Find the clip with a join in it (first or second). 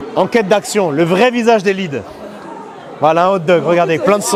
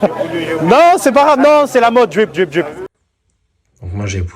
second